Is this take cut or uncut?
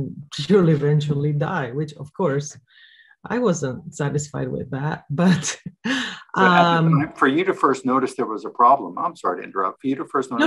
uncut